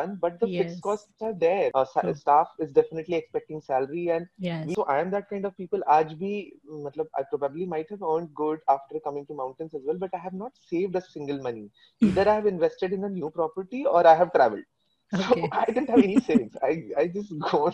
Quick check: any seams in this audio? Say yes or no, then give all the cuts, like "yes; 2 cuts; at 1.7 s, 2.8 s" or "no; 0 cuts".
yes; 2 cuts; at 1.7 s, 4.7 s